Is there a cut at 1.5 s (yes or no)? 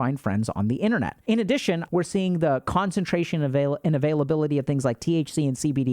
yes